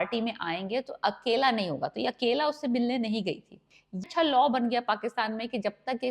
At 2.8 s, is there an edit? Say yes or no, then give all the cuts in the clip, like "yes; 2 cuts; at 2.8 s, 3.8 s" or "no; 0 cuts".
no; 1 cut; at 4.0 s